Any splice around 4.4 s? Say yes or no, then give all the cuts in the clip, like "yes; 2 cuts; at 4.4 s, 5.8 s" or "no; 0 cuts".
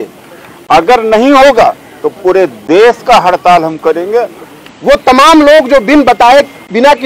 yes; 1 cut; at 4.4 s